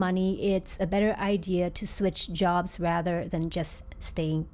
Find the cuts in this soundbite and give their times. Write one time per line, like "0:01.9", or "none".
none